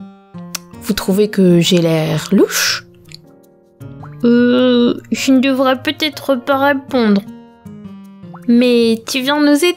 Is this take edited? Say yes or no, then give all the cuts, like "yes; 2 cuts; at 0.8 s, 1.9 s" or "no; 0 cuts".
no; 0 cuts